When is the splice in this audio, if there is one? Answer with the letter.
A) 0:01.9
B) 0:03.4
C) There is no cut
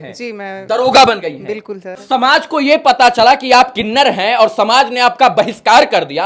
C